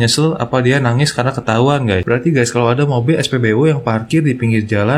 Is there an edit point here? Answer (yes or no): yes